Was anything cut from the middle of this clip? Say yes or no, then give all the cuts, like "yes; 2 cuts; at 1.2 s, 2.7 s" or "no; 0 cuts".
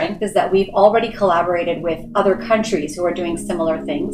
no; 0 cuts